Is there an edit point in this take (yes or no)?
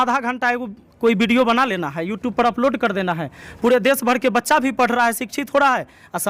no